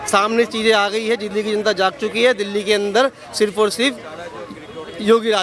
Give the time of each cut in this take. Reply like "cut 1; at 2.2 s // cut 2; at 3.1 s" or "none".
none